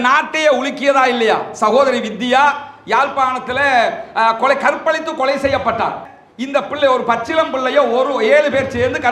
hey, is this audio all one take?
no; 1 cut; at 6.2 s

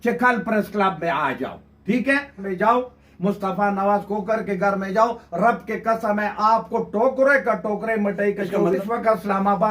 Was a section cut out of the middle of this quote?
yes; 2 cuts; at 2.5 s, 8.8 s

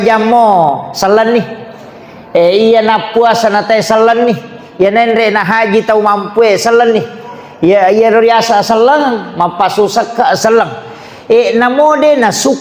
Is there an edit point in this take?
no; 0 cuts

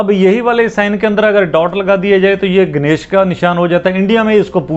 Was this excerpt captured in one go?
yes; 0 cuts

